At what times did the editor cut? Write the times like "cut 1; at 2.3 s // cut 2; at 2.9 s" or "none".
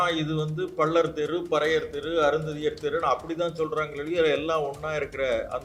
none